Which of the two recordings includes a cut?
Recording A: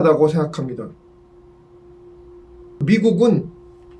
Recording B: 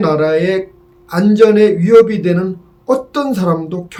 A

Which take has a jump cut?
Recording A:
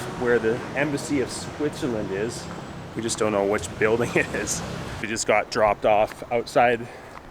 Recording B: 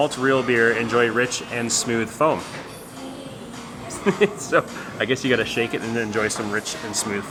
A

